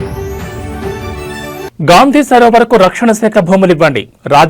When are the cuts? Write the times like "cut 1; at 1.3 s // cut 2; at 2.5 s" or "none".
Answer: cut 1; at 1.4 s